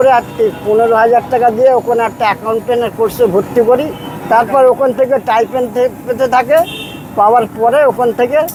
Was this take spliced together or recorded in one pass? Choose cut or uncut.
uncut